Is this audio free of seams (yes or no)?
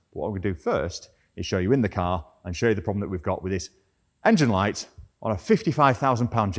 yes